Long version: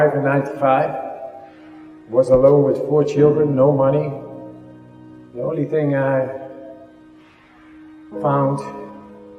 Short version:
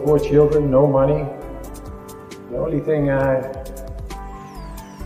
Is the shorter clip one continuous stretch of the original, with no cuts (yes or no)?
yes